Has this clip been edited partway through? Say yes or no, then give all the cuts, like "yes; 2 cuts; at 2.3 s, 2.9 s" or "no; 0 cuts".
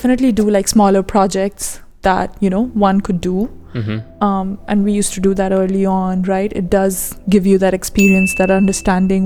no; 0 cuts